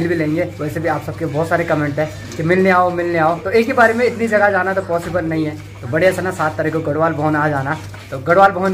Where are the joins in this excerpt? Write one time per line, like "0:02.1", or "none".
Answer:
none